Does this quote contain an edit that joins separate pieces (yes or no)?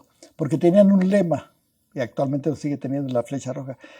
no